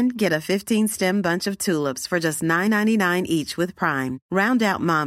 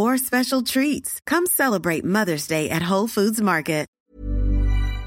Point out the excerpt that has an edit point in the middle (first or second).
second